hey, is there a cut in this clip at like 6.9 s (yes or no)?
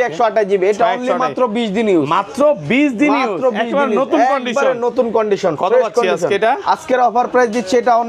no